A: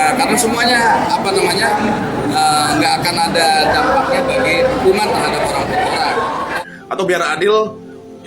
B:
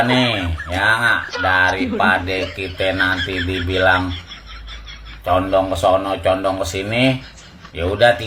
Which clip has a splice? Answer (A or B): A